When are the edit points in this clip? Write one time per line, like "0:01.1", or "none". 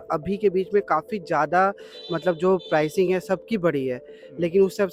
none